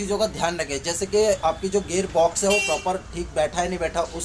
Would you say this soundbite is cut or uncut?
uncut